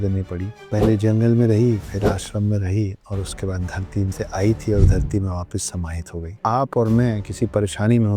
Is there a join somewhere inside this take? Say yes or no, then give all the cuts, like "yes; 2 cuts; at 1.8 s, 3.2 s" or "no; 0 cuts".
yes; 1 cut; at 6.3 s